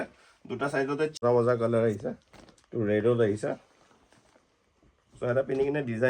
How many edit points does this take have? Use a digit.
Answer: 1